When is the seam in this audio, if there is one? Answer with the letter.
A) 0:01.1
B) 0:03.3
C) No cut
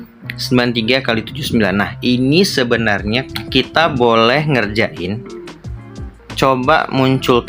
B